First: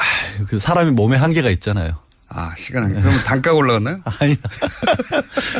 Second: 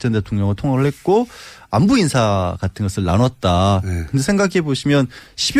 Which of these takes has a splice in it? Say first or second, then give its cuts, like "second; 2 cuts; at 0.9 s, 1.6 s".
second; 1 cut; at 3.2 s